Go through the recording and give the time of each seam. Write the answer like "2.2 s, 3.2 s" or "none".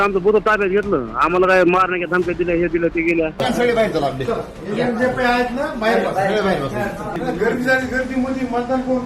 3.4 s, 7.1 s